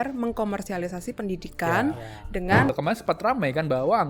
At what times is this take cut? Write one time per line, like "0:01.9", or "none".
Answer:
0:02.7